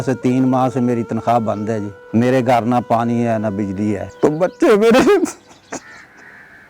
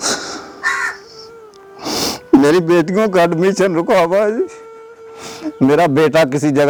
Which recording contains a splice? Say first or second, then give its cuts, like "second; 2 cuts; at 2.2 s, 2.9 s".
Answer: first; 2 cuts; at 1.9 s, 4.1 s